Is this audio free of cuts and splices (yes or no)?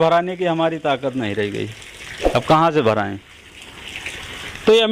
yes